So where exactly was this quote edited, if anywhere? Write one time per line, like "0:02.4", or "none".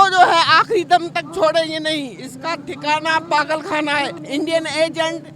0:04.2